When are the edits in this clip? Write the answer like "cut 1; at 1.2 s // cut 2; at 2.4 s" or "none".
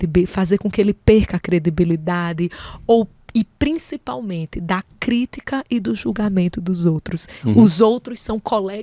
cut 1; at 7.3 s